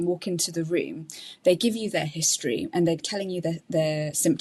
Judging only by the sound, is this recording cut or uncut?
uncut